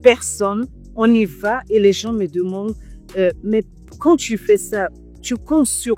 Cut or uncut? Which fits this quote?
uncut